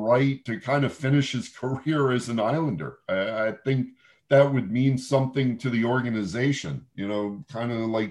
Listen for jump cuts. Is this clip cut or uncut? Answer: uncut